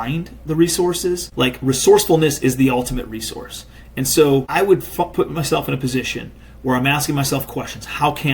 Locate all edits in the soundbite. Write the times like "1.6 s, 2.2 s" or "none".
1.3 s, 4.5 s